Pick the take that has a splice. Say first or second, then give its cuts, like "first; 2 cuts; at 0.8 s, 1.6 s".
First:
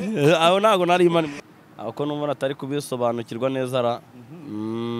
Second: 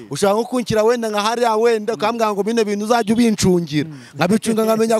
first; 1 cut; at 1.4 s